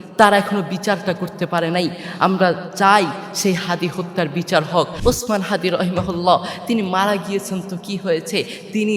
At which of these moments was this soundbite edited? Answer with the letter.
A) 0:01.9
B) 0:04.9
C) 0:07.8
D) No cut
B